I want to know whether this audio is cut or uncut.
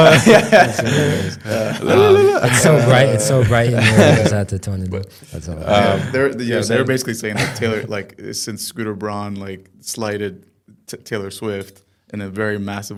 uncut